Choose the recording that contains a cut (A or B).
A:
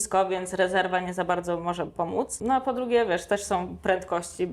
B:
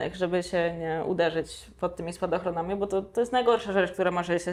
A